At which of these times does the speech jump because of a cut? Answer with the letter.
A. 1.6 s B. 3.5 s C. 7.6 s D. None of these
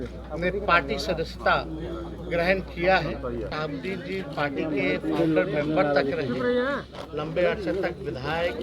B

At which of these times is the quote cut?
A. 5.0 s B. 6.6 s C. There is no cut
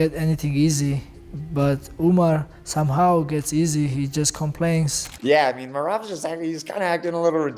A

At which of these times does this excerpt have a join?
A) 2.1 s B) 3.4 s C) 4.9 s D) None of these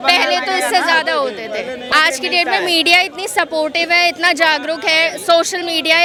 D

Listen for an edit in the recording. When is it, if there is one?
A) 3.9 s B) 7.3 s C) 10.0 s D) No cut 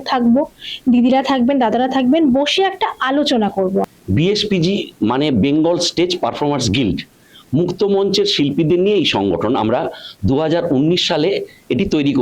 A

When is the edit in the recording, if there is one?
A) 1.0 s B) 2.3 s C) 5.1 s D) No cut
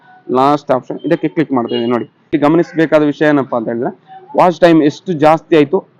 B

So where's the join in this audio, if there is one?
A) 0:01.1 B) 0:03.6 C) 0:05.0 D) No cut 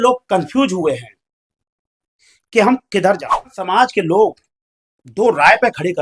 B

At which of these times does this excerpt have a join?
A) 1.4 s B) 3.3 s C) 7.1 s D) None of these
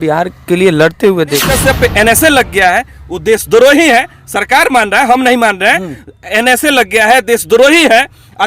A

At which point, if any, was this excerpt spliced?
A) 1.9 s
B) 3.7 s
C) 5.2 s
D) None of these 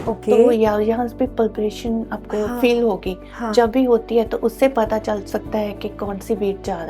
C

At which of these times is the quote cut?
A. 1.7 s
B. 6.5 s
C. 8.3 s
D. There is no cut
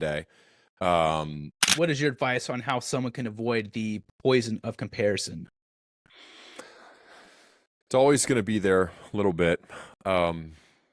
A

